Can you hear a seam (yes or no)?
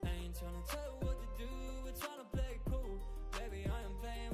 no